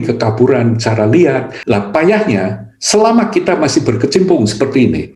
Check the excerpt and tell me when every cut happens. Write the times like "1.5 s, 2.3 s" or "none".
1.5 s